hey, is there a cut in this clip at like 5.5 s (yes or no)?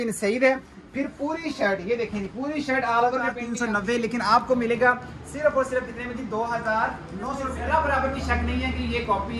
no